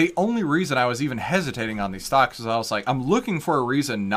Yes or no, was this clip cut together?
no